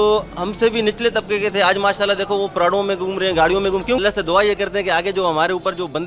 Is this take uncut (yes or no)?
yes